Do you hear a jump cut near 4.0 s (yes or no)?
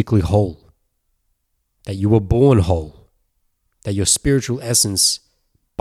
no